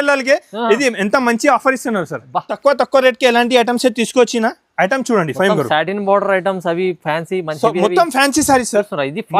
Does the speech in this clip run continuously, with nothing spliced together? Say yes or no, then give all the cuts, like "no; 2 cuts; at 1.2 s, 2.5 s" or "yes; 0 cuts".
no; 1 cut; at 2.5 s